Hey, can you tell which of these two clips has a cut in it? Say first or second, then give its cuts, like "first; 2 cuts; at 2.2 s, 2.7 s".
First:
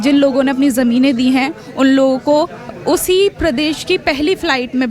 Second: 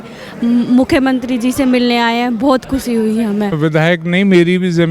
second; 1 cut; at 3.6 s